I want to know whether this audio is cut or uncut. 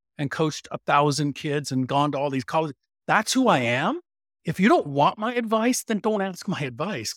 uncut